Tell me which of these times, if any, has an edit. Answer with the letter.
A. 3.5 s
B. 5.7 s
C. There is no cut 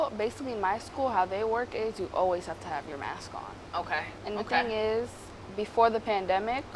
C